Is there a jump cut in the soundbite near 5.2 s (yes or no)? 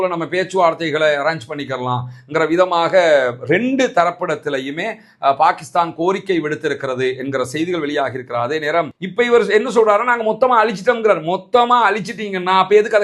no